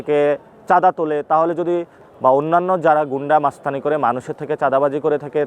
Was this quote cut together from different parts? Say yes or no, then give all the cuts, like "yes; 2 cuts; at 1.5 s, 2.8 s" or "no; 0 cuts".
yes; 1 cut; at 2.0 s